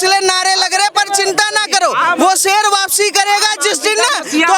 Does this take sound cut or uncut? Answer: uncut